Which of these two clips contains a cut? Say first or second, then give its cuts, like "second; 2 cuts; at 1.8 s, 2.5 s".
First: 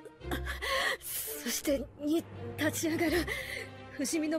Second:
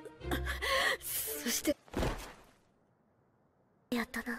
first; 1 cut; at 1.7 s